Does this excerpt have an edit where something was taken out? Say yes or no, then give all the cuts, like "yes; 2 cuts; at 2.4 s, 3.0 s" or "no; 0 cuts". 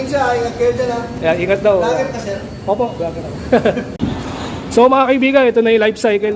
yes; 1 cut; at 3.9 s